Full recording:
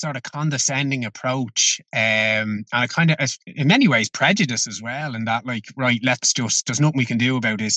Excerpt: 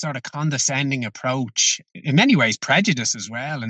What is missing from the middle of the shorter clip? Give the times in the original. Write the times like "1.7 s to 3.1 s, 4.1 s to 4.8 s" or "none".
1.9 s to 3.4 s